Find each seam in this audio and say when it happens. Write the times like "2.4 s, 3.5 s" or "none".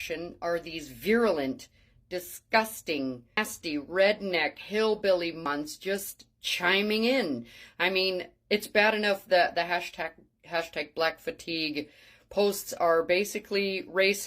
3.4 s, 5.5 s